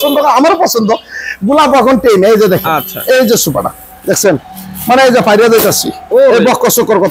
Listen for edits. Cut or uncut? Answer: uncut